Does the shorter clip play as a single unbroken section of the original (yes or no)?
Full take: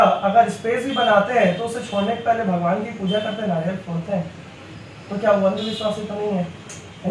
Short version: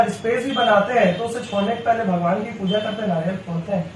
yes